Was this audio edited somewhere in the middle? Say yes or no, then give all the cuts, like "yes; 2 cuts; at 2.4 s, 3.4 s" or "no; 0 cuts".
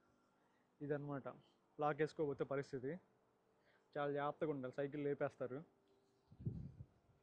no; 0 cuts